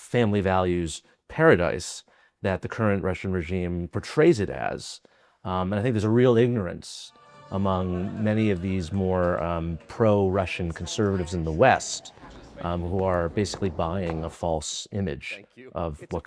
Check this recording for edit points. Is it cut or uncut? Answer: uncut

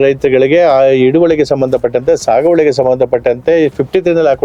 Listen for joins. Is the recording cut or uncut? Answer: uncut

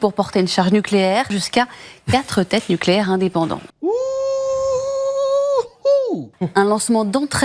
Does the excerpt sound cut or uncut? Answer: cut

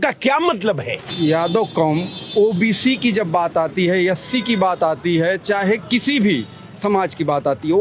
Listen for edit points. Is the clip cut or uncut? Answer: cut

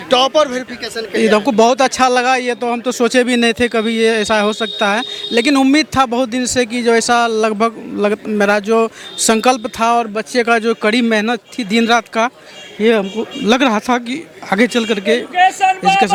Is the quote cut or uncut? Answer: uncut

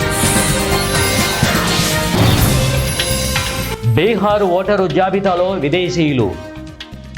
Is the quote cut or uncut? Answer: uncut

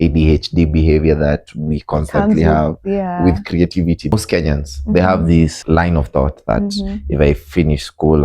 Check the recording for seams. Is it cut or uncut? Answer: cut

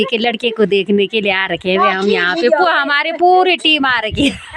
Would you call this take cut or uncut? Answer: uncut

